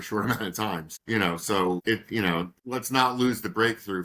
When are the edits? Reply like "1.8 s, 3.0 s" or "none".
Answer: 0.9 s, 1.8 s, 2.6 s